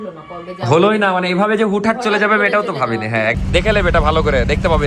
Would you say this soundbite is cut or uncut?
cut